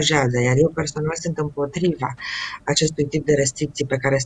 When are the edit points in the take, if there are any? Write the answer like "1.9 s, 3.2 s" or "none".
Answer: none